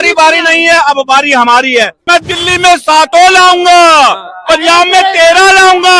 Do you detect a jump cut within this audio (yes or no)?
yes